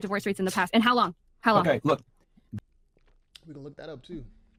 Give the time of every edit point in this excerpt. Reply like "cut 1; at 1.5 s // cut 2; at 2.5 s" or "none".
none